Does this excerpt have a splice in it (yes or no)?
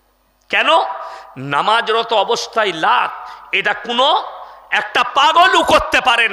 no